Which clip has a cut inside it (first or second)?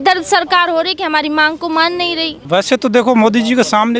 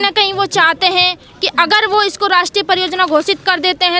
first